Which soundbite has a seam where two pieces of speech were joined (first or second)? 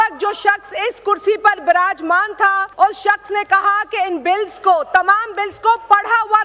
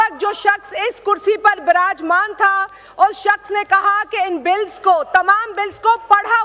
first